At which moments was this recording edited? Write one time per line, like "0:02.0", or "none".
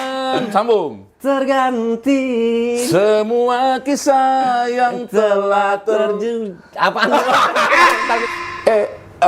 0:08.2